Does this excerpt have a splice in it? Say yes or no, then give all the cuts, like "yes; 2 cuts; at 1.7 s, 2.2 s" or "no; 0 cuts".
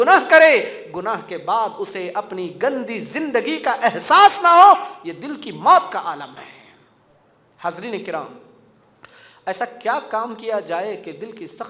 no; 0 cuts